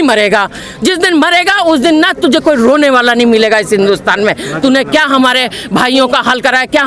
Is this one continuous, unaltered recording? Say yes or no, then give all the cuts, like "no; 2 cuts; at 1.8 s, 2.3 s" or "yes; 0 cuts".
yes; 0 cuts